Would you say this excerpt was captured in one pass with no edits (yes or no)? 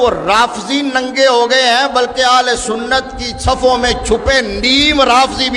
yes